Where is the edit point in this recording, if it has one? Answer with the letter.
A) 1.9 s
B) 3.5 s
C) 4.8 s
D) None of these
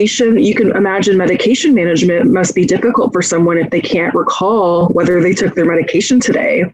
C